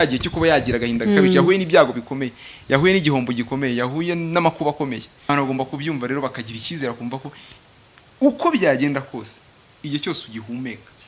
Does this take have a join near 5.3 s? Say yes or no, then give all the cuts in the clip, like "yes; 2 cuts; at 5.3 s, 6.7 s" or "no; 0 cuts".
yes; 1 cut; at 5.3 s